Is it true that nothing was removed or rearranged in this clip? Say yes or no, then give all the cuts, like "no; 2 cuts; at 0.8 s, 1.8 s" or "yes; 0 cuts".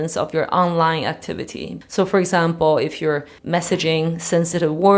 no; 2 cuts; at 1.7 s, 3.3 s